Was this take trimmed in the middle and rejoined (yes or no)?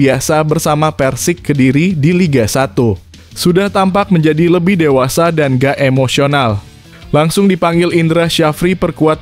no